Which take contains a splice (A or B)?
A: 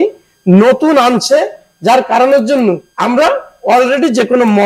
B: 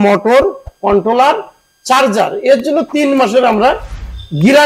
A